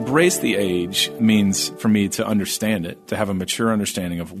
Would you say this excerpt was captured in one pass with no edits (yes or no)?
no